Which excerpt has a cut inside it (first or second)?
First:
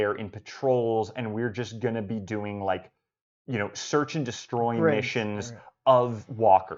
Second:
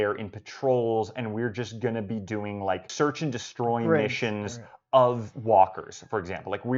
second